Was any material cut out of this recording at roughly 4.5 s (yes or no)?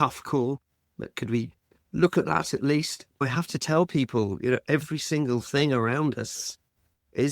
no